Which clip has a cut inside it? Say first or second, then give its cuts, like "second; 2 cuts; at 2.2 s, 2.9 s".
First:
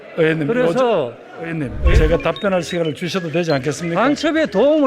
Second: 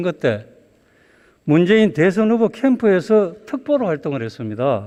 first; 1 cut; at 1.8 s